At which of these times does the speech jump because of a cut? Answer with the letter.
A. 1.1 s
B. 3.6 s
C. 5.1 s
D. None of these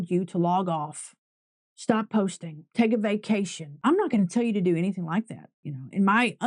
B